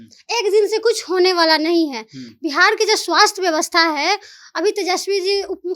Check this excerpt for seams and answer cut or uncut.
uncut